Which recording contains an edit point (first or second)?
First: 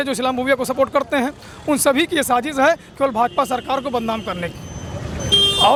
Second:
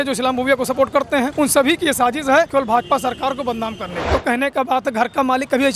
second